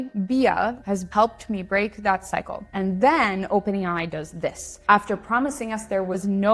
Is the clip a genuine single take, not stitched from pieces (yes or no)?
no